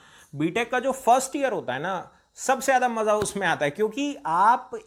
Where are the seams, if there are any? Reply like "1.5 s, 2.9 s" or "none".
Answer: none